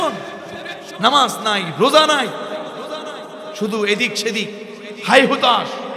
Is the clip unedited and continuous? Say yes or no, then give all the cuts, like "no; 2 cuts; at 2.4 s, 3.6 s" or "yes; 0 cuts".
yes; 0 cuts